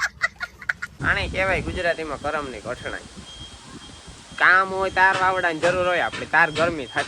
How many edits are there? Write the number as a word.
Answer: two